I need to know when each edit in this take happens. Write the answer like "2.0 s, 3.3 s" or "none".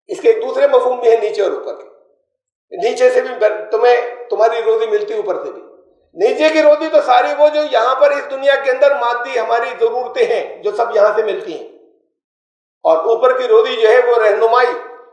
none